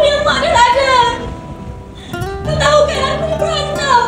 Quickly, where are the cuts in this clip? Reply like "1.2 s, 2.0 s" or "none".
none